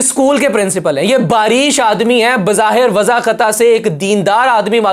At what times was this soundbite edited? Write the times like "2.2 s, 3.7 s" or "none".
none